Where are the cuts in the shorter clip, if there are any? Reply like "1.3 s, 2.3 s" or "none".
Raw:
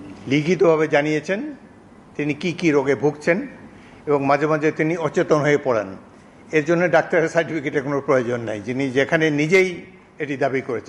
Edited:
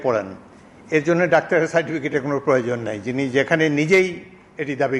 none